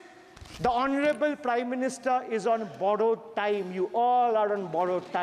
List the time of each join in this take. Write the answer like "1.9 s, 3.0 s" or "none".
none